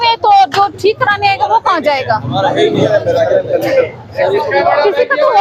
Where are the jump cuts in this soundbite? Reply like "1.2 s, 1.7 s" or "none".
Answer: none